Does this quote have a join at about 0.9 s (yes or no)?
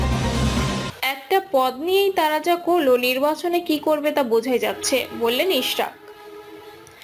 yes